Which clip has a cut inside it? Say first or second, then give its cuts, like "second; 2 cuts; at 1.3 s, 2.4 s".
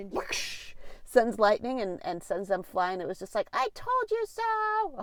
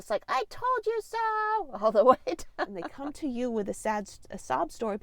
second; 1 cut; at 2.9 s